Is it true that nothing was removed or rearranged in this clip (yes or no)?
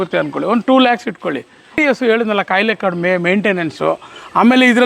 no